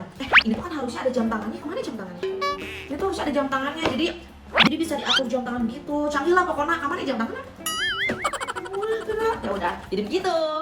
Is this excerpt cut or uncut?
uncut